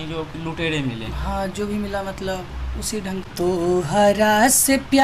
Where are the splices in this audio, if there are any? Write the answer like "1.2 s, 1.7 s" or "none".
3.2 s